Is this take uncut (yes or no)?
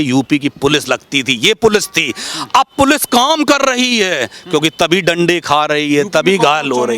yes